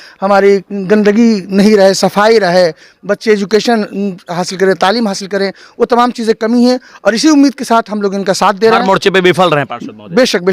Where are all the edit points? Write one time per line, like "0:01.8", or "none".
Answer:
none